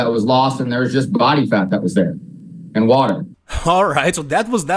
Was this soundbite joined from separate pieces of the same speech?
no; 0 cuts

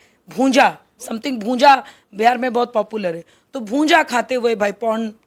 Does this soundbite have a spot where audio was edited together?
no; 0 cuts

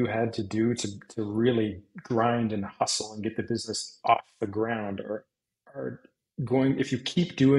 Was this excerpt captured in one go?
yes; 0 cuts

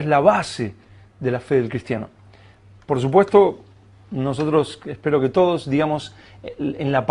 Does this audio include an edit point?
no; 0 cuts

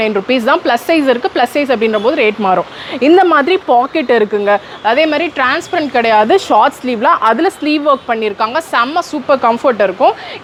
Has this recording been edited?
no; 0 cuts

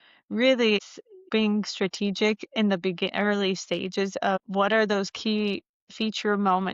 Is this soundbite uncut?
no; 2 cuts; at 1.3 s, 4.4 s

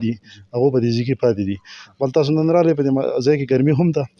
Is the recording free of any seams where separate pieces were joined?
yes; 0 cuts

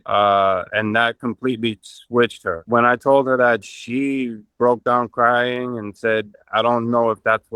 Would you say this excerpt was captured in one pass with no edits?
yes; 0 cuts

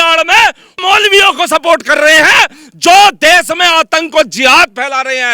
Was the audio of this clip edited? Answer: no; 0 cuts

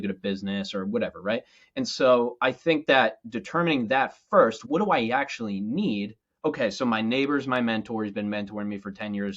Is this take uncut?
no; 1 cut; at 4.6 s

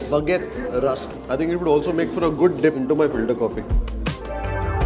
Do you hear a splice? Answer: no; 0 cuts

